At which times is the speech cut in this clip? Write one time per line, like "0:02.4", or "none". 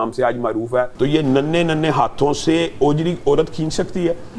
0:00.9